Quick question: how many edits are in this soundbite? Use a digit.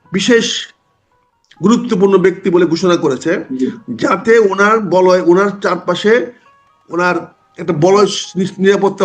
0